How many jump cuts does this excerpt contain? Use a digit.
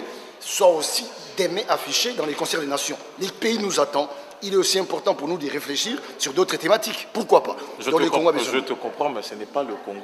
1